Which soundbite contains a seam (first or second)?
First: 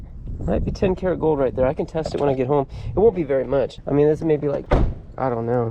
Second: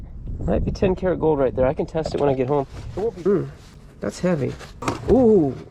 second